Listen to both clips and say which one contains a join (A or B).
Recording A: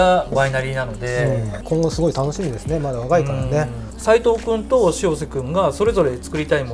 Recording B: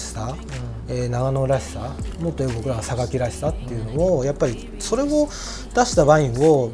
A